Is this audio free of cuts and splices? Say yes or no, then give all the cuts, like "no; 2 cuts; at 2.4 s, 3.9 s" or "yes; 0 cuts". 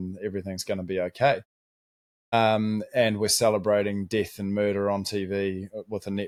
yes; 0 cuts